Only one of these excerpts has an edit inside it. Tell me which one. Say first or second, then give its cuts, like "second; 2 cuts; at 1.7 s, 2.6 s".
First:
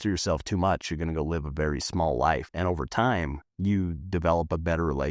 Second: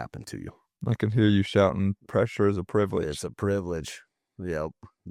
first; 2 cuts; at 2.5 s, 3.4 s